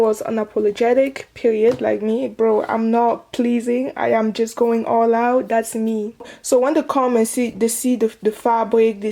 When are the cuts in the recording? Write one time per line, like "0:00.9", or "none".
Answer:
0:06.2